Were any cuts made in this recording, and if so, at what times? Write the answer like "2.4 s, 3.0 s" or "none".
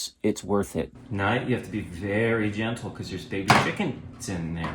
0.9 s

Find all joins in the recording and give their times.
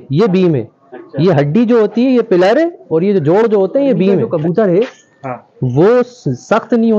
4.2 s

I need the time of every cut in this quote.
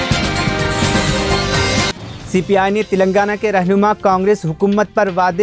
2.0 s

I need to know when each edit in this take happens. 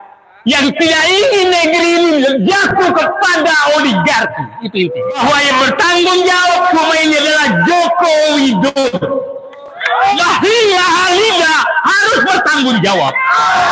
5.2 s, 10.1 s

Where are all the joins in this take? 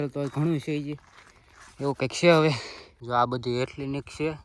3.0 s

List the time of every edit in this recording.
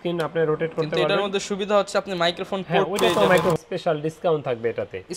3.6 s

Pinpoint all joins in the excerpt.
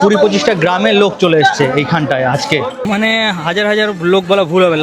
2.9 s

